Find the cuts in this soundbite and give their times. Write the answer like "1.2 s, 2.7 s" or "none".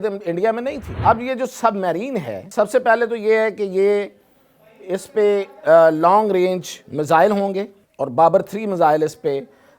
0.9 s, 2.4 s, 7.8 s